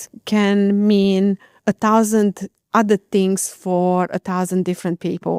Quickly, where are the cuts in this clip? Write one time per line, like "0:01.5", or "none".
none